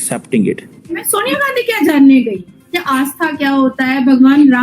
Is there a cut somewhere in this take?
yes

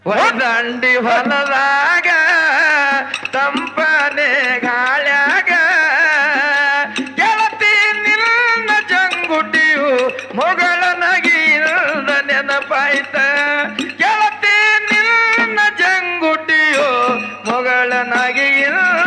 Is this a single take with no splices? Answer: yes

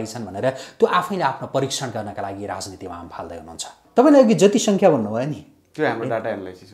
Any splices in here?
yes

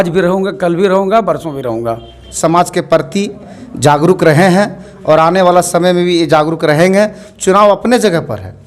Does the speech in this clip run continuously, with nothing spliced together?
no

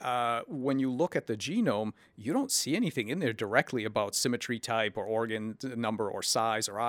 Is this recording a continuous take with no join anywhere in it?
no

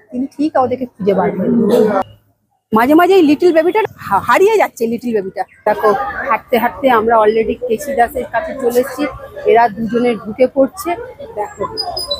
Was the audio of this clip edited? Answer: yes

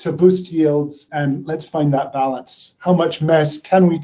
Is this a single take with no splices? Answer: no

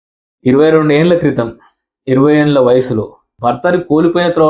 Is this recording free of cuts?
no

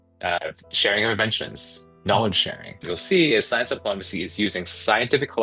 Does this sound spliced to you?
yes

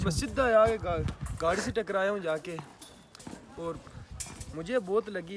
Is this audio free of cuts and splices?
yes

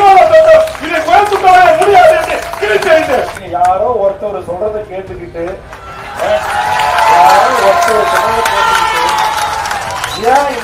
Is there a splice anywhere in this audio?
yes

